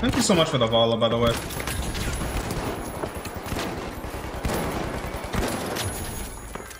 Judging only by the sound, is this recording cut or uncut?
uncut